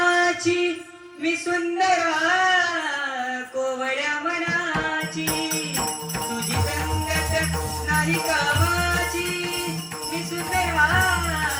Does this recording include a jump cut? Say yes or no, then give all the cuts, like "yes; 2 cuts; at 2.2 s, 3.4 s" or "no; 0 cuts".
no; 0 cuts